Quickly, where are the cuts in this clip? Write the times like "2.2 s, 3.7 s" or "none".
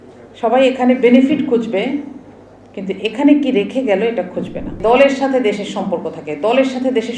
4.8 s